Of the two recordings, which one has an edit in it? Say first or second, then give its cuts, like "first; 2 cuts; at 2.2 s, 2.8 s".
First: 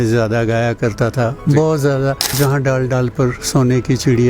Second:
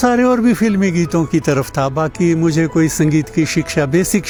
first; 1 cut; at 2.3 s